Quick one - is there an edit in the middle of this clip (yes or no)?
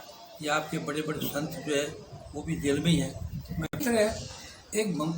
yes